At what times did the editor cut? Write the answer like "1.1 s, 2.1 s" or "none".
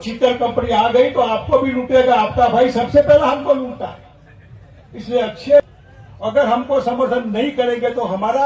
5.7 s